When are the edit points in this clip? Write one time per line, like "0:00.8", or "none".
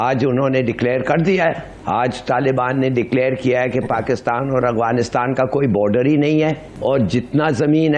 0:01.7
0:06.7

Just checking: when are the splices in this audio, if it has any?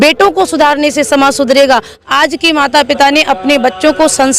0:02.0

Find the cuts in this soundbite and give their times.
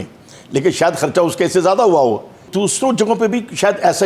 0:02.5

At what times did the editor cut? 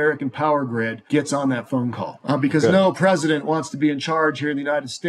0:02.1

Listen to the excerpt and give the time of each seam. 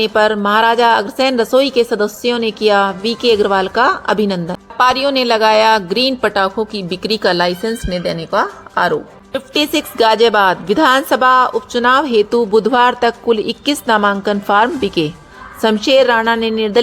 0:04.6
0:09.2

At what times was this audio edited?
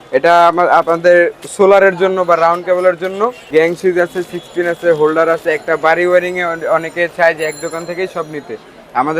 0:03.4

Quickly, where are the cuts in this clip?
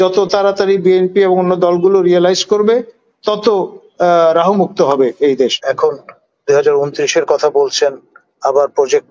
0:05.6

